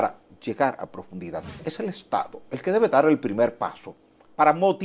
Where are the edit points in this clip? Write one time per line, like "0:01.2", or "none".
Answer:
0:01.7